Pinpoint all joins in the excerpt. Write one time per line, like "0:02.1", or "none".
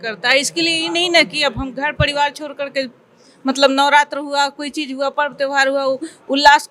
none